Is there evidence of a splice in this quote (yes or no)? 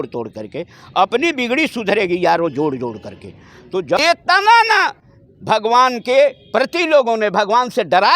yes